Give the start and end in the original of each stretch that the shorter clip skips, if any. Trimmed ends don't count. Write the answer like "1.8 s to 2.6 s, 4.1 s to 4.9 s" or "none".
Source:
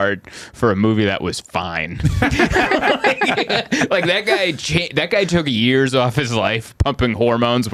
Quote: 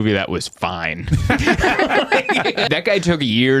3.6 s to 4.9 s